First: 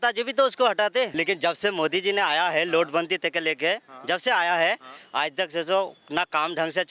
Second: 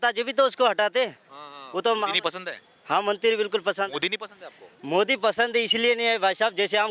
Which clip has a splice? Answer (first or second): first